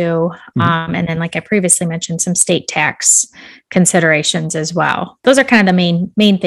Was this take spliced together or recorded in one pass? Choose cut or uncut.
cut